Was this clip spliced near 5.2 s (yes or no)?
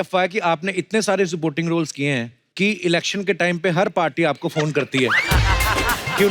no